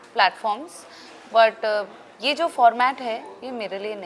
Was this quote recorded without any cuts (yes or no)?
yes